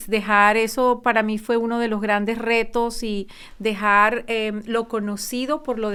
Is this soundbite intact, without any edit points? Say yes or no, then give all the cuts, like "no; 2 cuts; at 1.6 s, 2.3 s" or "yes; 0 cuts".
yes; 0 cuts